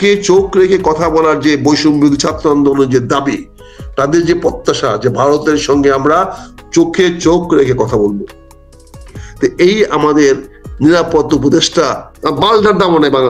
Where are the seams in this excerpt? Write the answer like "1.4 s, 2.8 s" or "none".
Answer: 12.1 s